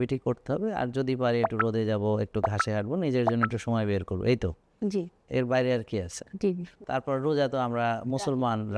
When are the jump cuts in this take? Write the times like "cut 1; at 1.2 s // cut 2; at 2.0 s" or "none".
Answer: cut 1; at 6.7 s